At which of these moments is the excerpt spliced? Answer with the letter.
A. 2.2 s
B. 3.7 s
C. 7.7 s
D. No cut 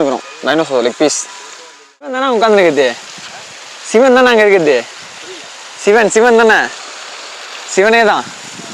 A